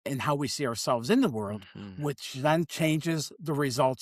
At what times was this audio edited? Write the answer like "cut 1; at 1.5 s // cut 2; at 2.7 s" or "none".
none

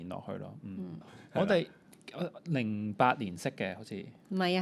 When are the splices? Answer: cut 1; at 1.1 s

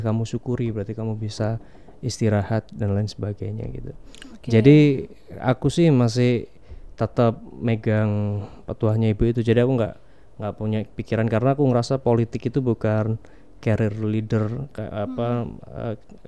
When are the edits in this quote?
none

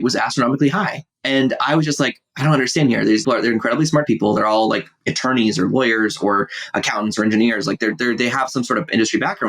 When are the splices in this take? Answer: cut 1; at 3.2 s

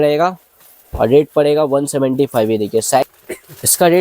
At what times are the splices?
cut 1; at 3.0 s

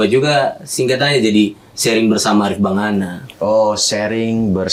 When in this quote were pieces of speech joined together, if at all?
none

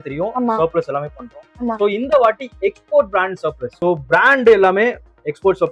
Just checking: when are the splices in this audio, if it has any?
cut 1; at 3.7 s

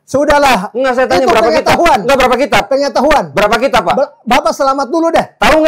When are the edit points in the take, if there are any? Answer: none

